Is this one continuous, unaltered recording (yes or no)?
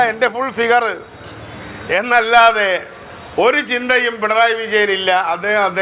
yes